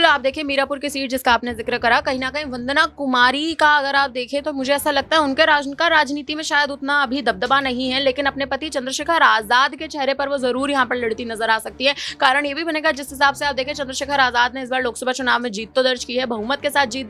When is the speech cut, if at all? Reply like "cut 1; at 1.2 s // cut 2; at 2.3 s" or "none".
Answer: none